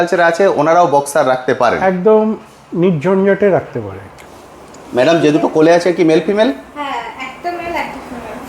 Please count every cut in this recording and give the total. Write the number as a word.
one